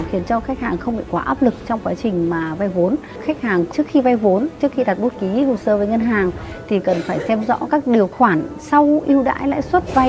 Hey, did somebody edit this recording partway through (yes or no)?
yes